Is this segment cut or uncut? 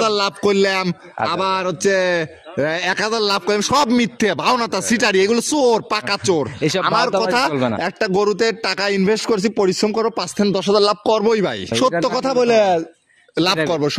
cut